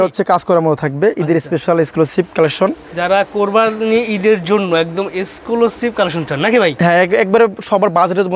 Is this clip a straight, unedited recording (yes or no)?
yes